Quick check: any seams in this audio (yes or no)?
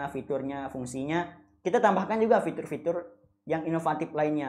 no